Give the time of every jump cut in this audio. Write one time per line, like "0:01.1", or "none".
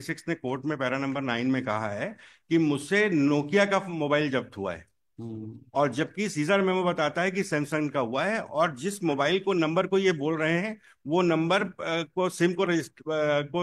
none